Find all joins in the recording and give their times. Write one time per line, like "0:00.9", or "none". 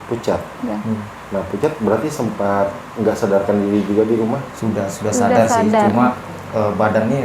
0:01.1
0:04.5